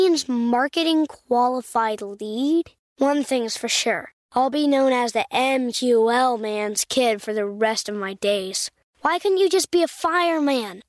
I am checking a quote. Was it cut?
no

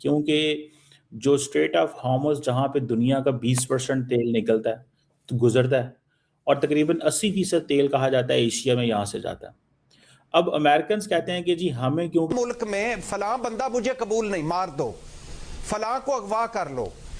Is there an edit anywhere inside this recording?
yes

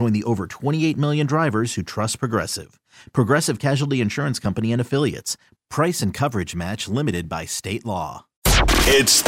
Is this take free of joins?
no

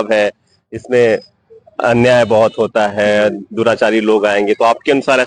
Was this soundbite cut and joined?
no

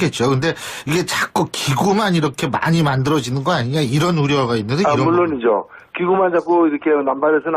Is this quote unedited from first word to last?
no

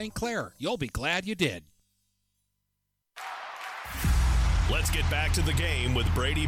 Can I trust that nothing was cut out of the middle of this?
yes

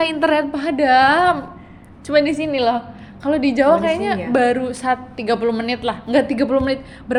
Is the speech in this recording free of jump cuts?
yes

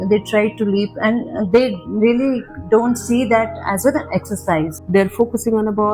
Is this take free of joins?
no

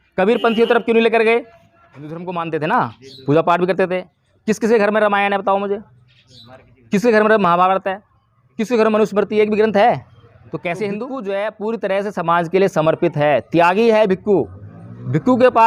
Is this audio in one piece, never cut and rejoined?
no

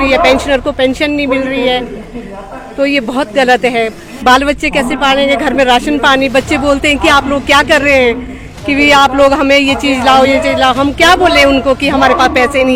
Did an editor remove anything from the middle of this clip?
no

